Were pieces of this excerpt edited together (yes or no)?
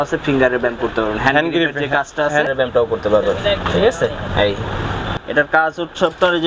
yes